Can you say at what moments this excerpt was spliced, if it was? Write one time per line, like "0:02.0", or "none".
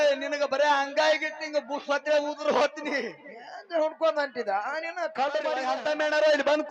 0:05.6